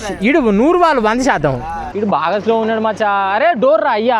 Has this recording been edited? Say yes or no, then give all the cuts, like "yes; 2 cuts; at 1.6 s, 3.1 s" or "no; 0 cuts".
yes; 1 cut; at 1.8 s